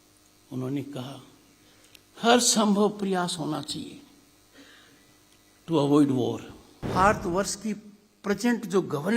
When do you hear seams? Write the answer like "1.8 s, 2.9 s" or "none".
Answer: 6.9 s